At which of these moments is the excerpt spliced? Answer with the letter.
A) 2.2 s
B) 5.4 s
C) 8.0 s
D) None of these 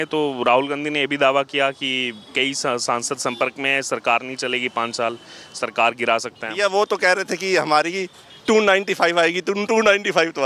D